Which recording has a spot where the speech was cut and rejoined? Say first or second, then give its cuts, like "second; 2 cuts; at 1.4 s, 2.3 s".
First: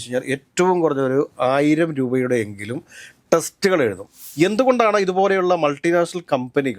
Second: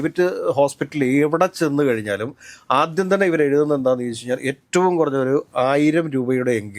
first; 1 cut; at 4.2 s